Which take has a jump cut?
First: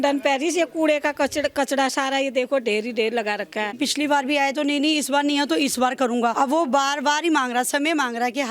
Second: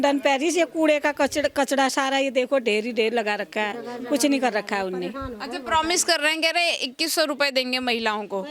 first; 2 cuts; at 3.8 s, 6.3 s

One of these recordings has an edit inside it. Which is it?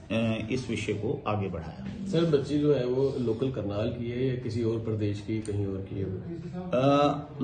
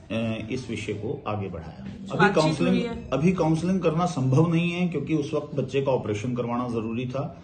second; 1 cut; at 2.1 s

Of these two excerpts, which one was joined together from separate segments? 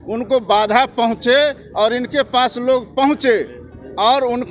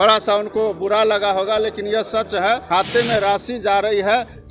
second; 1 cut; at 2.6 s

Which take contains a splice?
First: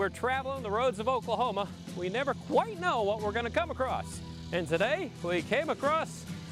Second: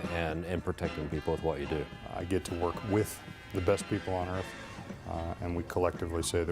second; 1 cut; at 1.9 s

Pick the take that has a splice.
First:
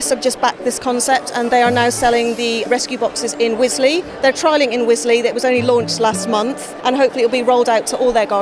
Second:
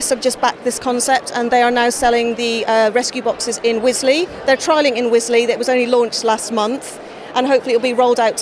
first; 2 cuts; at 2.7 s, 6.7 s

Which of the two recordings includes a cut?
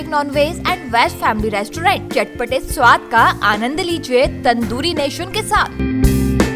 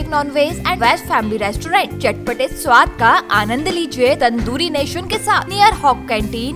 second; 3 cuts; at 0.8 s, 4.2 s, 5.5 s

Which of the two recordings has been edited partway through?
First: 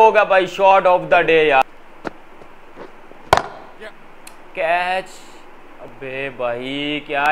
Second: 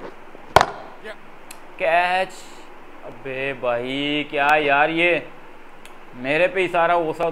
first; 1 cut; at 1.6 s

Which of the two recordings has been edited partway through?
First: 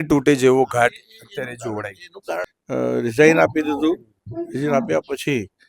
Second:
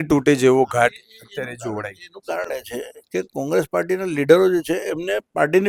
first; 1 cut; at 2.5 s

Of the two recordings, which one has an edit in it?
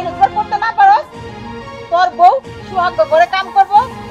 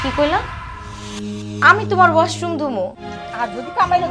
second; 1 cut; at 3.0 s

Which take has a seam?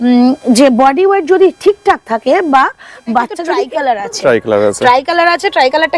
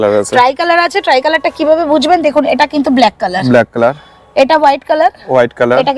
first; 1 cut; at 3.5 s

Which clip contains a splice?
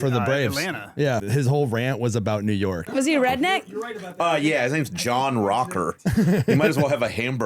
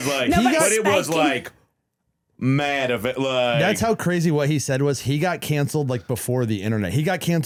first; 2 cuts; at 1.2 s, 2.9 s

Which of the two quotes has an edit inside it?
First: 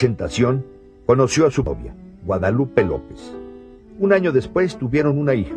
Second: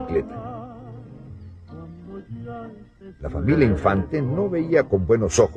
first; 1 cut; at 4.6 s

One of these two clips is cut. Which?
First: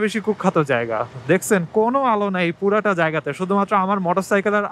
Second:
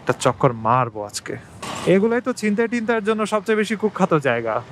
second; 1 cut; at 1.6 s

